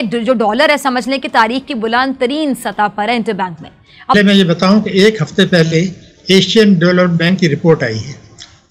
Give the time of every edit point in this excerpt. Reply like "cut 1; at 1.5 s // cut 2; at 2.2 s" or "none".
cut 1; at 4.1 s